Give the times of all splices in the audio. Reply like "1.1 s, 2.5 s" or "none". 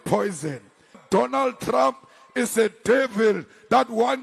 1.0 s